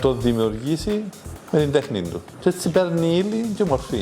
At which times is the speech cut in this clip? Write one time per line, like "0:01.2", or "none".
0:02.2